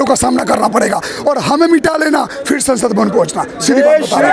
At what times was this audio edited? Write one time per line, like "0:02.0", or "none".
none